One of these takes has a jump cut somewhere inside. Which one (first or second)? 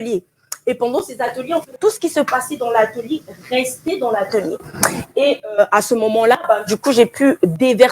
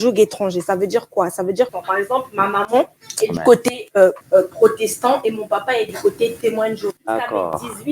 second